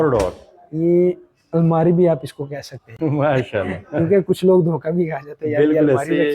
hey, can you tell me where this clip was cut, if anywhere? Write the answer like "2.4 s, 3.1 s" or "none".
none